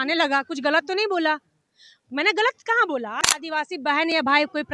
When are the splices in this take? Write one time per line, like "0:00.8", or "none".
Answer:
0:03.2